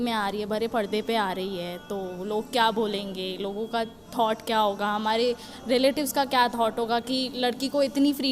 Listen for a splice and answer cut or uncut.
uncut